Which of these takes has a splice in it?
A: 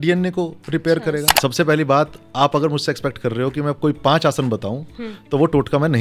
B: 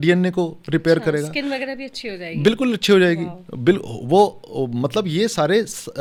A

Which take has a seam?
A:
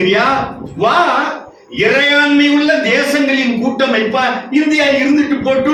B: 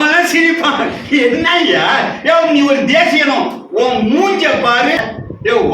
B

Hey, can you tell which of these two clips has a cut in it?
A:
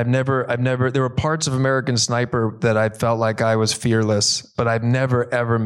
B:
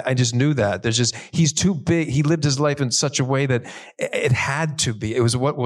A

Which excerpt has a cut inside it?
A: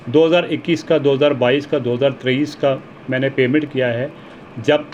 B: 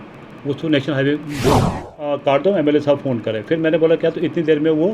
B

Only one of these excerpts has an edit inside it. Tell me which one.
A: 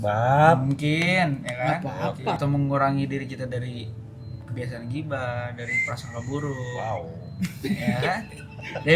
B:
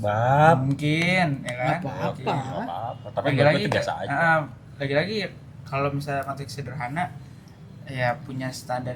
A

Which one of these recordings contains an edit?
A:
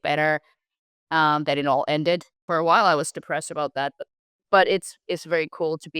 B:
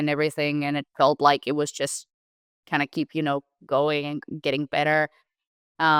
A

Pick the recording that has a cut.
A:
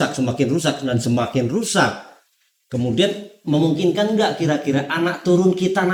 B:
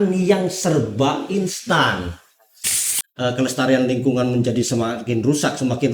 B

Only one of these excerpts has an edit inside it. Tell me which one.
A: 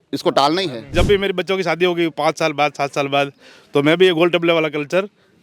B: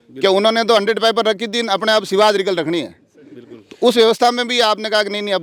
A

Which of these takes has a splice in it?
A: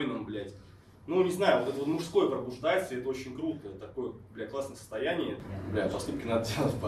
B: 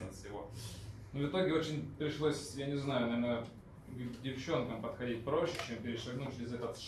A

